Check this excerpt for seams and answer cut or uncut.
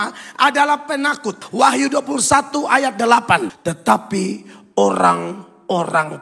cut